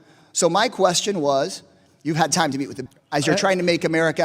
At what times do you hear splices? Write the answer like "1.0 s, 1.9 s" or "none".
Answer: 2.8 s